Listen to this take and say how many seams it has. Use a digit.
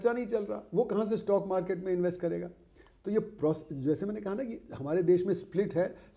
0